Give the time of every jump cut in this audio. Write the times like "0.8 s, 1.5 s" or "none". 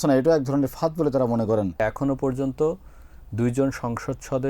1.8 s